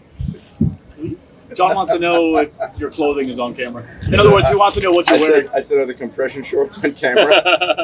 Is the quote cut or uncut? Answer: cut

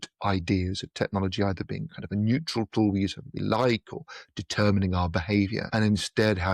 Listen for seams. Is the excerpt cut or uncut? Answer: cut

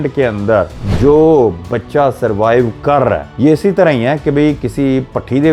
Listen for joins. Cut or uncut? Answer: uncut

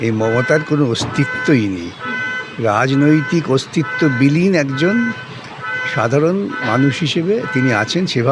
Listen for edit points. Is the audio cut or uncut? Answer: uncut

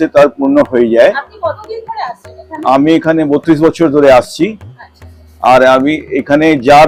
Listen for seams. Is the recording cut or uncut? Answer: uncut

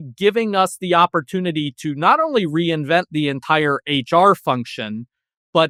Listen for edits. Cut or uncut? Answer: uncut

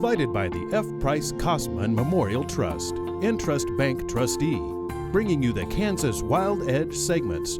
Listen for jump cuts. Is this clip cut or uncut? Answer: uncut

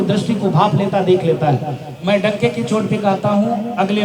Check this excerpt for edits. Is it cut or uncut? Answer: uncut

